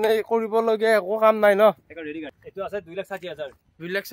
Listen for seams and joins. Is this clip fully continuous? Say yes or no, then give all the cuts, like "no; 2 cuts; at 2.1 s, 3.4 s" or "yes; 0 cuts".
no; 1 cut; at 2.4 s